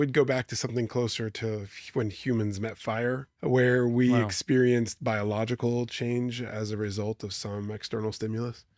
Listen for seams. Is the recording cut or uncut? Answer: cut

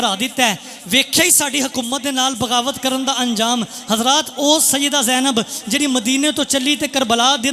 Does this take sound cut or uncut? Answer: uncut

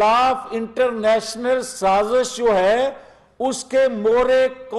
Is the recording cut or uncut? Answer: uncut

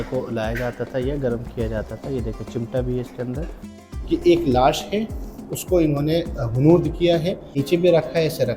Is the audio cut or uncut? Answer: cut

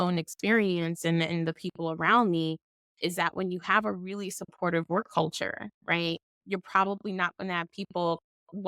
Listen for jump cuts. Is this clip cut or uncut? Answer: cut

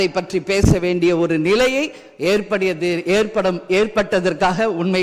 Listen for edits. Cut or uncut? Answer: uncut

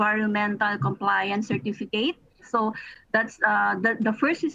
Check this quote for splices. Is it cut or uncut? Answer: cut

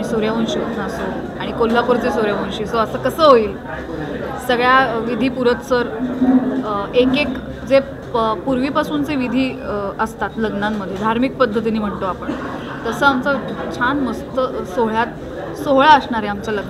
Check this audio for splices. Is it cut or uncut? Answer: uncut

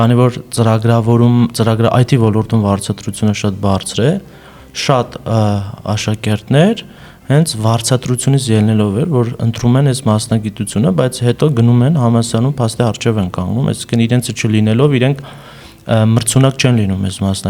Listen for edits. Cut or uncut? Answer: uncut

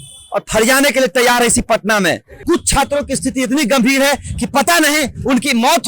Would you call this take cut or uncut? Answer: cut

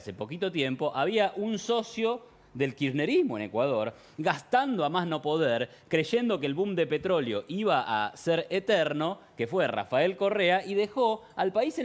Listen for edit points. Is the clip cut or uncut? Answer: uncut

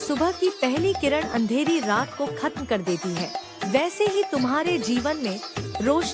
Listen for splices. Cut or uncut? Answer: uncut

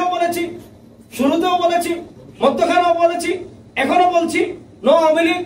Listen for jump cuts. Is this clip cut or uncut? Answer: uncut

